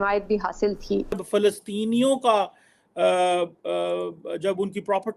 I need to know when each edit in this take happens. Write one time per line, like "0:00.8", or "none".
0:01.2

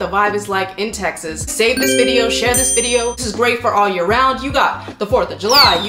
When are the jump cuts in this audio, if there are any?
0:01.5
0:03.2

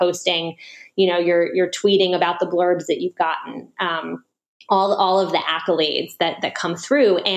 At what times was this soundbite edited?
none

